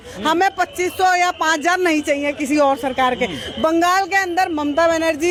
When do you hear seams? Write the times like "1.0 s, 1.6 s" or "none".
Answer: none